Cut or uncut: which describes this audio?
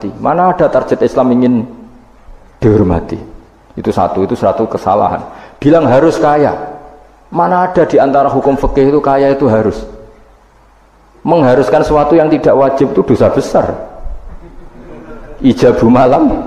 uncut